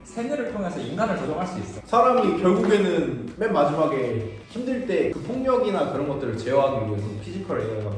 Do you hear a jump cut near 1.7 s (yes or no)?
yes